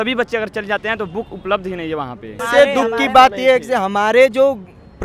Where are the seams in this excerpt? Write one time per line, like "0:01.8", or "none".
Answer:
0:02.4